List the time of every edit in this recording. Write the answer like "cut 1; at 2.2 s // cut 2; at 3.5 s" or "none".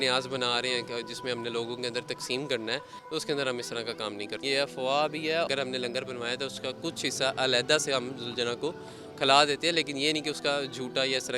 cut 1; at 2.9 s // cut 2; at 4.4 s // cut 3; at 5.5 s